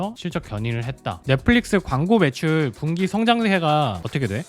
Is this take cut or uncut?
cut